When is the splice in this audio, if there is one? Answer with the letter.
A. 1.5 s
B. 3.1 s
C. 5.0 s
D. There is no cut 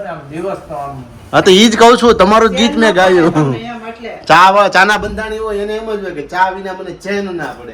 D